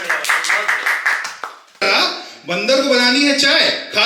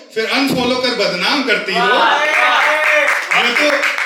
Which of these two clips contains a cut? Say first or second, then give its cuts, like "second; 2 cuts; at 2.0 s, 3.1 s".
first; 1 cut; at 1.9 s